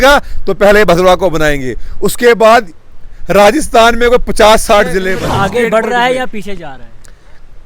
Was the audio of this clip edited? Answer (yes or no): yes